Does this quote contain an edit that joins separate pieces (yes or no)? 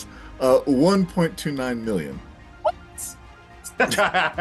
no